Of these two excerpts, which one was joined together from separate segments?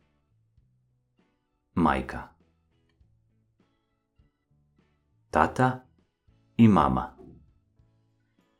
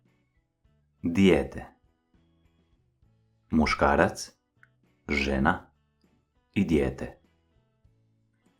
second; 3 cuts; at 1.8 s, 3.2 s, 7.2 s

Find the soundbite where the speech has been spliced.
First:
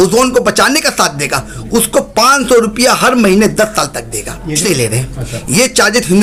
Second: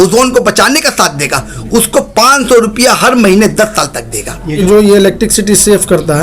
second; 1 cut; at 4.6 s

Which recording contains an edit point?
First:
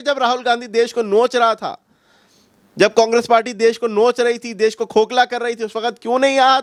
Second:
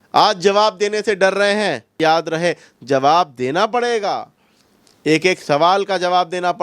second; 1 cut; at 1.9 s

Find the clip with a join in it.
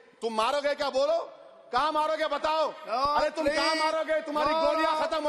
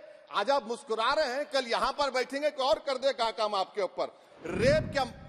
second; 1 cut; at 4.3 s

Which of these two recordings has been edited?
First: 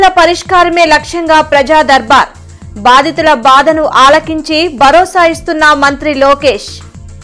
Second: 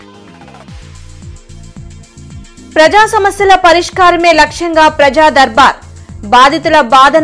second; 1 cut; at 2.5 s

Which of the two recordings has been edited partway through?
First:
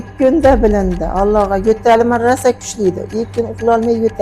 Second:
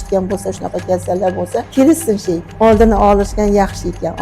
second; 2 cuts; at 1.7 s, 2.5 s

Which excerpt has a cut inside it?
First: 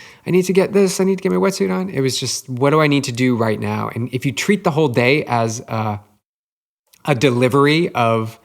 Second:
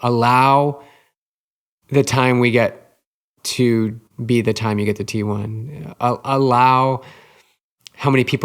second; 1 cut; at 4.0 s

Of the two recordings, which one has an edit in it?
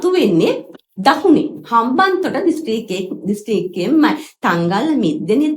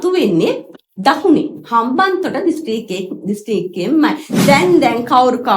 second; 1 cut; at 4.3 s

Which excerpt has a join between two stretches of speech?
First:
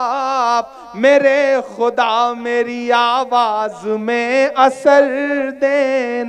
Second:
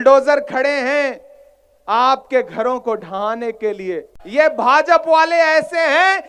second; 1 cut; at 4.1 s

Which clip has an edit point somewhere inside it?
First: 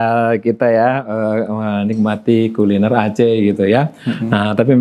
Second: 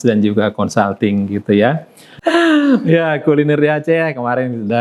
second; 1 cut; at 2.1 s

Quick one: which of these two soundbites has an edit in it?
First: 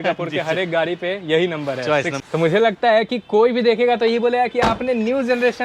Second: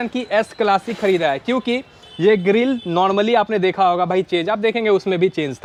first; 1 cut; at 2.2 s

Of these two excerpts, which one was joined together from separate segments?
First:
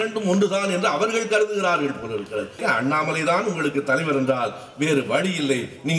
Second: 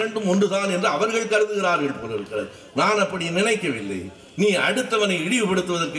first; 1 cut; at 2.6 s

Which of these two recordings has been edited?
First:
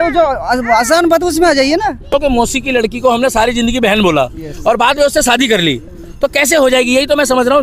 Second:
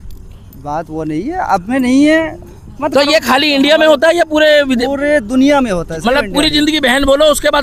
first; 1 cut; at 2.1 s

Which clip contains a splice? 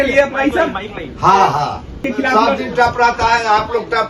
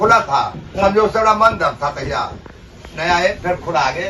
first; 1 cut; at 2.0 s

